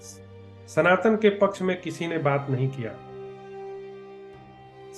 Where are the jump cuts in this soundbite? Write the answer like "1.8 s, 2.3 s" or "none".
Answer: none